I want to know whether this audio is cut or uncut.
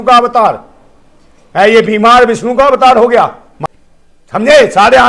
cut